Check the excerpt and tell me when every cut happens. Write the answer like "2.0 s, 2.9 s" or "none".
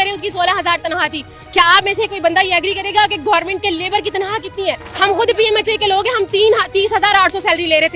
4.9 s